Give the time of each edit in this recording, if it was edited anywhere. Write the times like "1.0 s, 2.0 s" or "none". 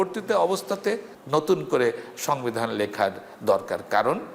1.1 s